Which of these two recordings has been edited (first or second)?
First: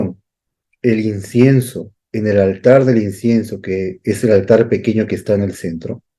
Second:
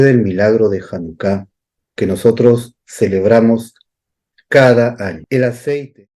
second